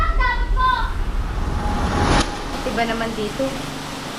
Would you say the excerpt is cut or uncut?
uncut